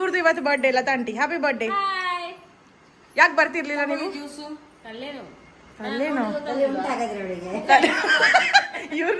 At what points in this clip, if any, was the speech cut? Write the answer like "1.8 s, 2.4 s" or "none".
none